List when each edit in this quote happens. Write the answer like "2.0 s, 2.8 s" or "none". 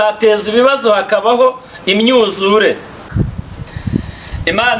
3.1 s